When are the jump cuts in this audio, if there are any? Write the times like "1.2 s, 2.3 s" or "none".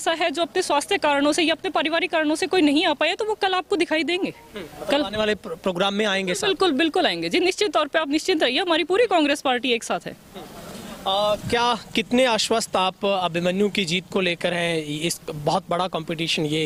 none